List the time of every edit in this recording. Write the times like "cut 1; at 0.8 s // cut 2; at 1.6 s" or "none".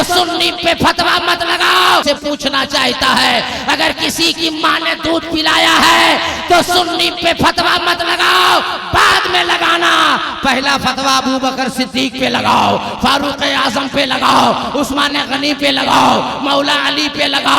cut 1; at 2.0 s